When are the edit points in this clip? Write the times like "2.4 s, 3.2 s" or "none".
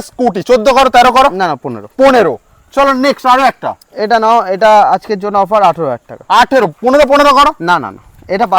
none

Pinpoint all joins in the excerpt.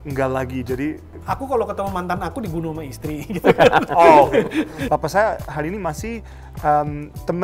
1.1 s, 4.8 s

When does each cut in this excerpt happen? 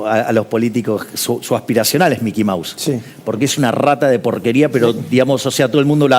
none

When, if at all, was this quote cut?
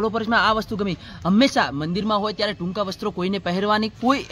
none

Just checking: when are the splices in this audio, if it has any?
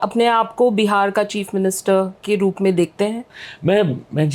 3.3 s

